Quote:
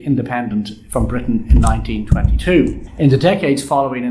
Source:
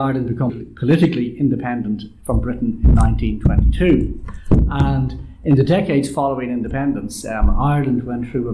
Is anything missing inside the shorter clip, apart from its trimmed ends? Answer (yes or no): yes